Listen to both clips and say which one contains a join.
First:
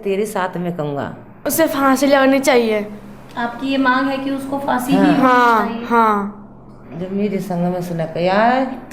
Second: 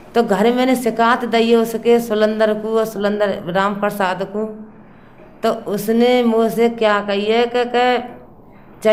first; 1 cut; at 1.2 s

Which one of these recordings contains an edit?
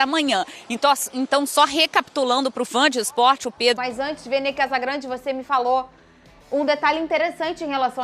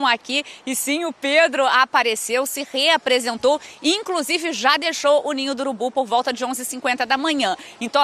first; 1 cut; at 3.8 s

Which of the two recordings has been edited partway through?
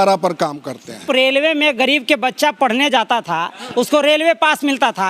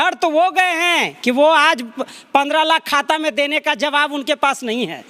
first; 1 cut; at 1.0 s

